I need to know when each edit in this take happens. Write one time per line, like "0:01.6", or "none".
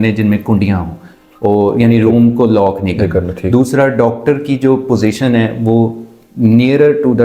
none